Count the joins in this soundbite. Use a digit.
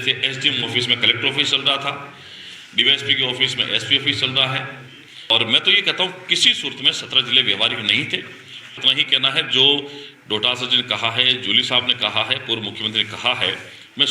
2